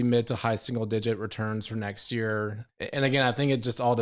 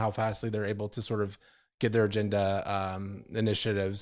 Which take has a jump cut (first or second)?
first